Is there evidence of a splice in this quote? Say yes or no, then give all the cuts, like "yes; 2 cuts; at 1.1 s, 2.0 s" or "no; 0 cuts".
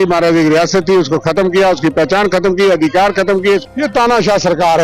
yes; 1 cut; at 3.6 s